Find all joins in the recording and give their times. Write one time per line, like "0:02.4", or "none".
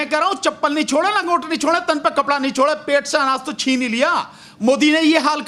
none